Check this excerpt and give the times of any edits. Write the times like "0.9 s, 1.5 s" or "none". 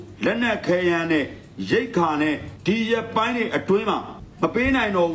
2.5 s, 4.2 s